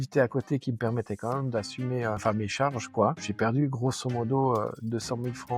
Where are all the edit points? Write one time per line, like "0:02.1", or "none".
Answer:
0:02.2
0:03.2